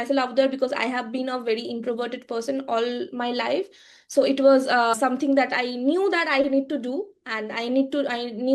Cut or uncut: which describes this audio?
uncut